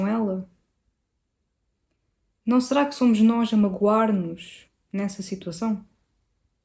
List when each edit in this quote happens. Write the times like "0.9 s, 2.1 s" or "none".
none